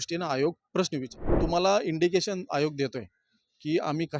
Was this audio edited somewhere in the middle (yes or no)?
yes